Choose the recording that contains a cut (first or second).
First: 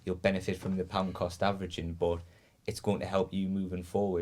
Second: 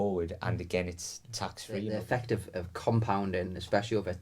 second